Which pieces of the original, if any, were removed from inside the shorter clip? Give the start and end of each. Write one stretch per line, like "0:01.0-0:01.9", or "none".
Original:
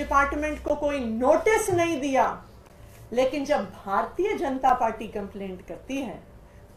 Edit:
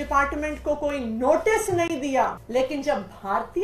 0:02.4-0:03.0